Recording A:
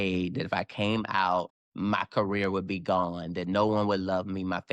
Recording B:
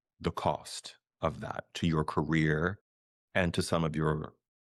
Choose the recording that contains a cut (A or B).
A